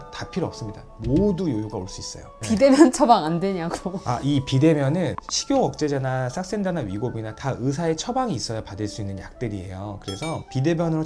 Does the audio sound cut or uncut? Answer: cut